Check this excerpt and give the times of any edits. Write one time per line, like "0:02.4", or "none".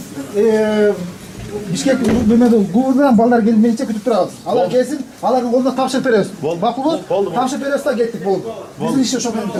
none